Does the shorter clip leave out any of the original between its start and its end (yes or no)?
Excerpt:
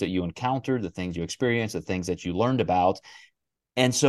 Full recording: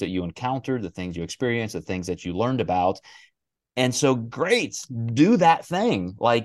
no